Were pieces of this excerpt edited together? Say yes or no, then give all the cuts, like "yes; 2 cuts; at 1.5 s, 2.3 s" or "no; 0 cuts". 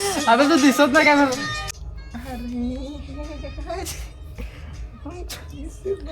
yes; 1 cut; at 1.7 s